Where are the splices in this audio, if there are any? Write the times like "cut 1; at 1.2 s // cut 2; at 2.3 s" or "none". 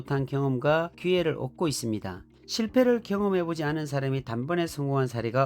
cut 1; at 2.2 s